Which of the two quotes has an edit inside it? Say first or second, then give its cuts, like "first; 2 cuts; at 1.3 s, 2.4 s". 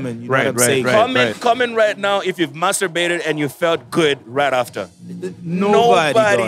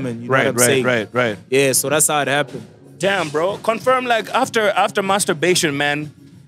first; 1 cut; at 0.9 s